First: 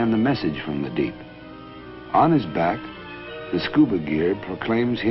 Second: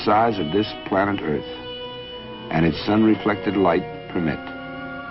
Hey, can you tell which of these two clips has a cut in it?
second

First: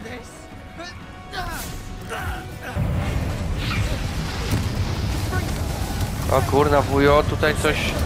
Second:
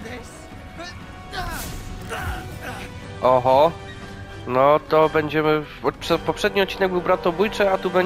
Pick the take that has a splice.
first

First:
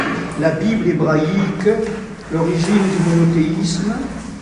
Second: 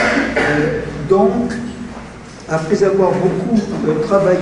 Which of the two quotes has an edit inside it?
second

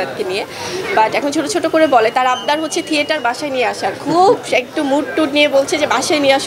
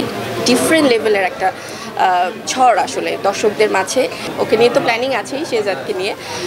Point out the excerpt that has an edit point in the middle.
second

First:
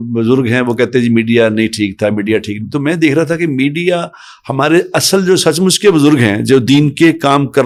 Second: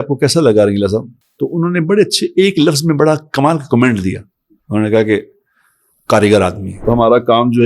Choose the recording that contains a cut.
second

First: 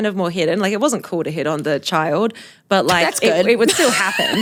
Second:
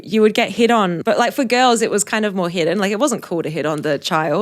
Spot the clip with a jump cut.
second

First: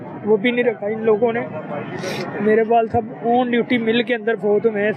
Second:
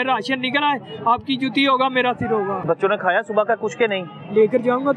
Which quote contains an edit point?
second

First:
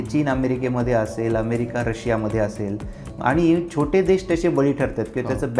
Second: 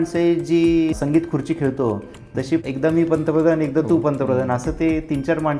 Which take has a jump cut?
second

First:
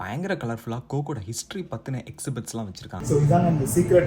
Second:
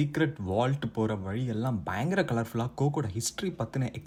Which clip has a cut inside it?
first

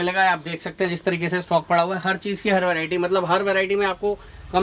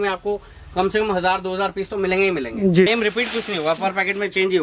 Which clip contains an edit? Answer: second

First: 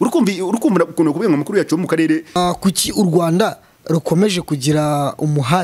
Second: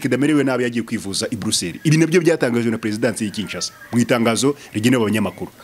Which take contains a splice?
first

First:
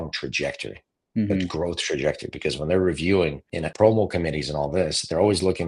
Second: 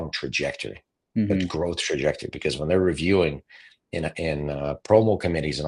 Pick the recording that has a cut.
first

